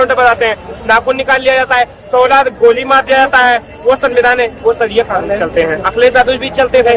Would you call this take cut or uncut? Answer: uncut